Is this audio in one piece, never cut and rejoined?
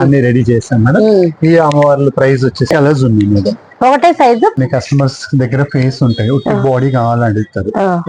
no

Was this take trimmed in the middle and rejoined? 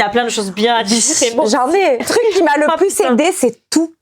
yes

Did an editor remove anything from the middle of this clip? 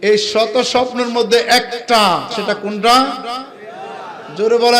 yes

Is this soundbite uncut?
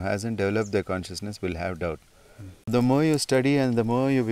no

